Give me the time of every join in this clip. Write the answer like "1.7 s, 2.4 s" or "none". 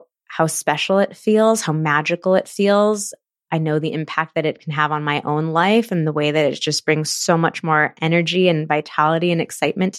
none